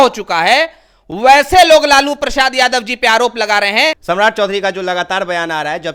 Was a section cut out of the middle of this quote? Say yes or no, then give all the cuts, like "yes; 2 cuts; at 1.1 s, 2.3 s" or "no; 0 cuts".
no; 0 cuts